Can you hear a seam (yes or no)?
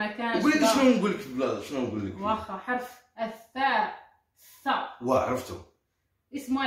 no